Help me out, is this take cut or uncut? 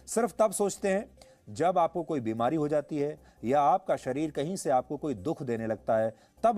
uncut